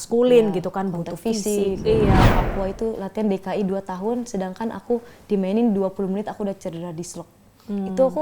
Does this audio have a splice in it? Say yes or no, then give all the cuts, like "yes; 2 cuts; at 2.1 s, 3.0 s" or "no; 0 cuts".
yes; 1 cut; at 2.3 s